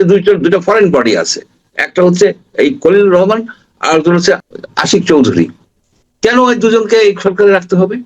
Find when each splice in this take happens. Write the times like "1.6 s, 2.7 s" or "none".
4.5 s

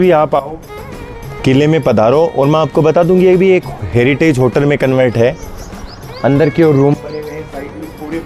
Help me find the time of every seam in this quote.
none

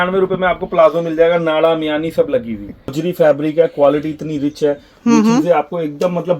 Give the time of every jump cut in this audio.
2.9 s

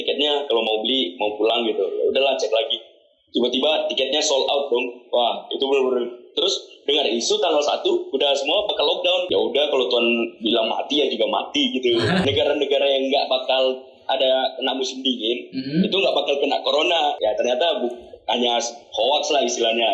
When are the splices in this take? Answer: 9.3 s, 12.2 s, 17.2 s

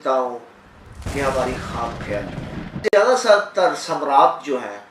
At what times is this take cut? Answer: 2.9 s

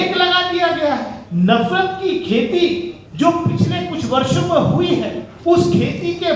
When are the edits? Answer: 1.2 s, 3.0 s, 5.2 s

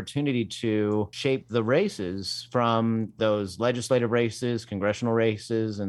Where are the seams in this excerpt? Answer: 1.1 s, 3.2 s

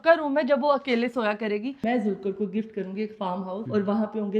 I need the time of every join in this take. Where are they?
1.8 s

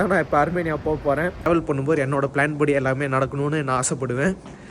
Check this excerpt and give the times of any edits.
1.5 s

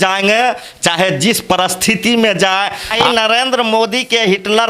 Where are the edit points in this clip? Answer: 3.0 s

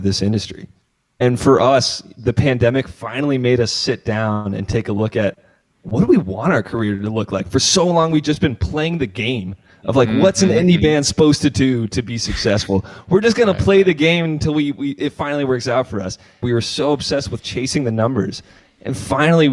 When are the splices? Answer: 16.4 s

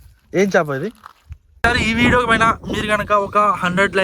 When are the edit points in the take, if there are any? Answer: 1.6 s

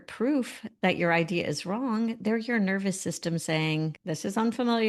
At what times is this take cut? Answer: 4.0 s

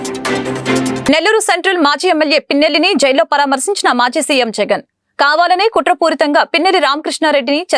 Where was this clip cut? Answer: 1.0 s

